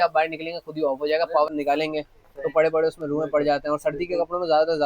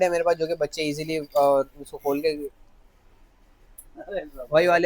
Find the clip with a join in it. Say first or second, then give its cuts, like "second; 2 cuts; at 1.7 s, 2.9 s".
first; 1 cut; at 1.5 s